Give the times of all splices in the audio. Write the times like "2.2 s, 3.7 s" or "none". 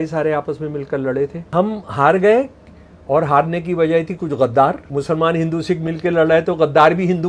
1.4 s, 4.8 s